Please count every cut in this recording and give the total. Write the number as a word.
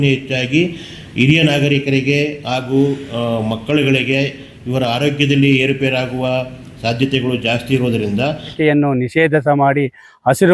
one